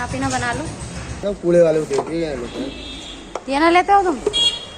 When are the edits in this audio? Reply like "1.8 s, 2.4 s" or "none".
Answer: 1.2 s